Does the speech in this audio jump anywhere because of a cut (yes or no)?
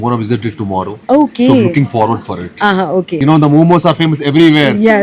yes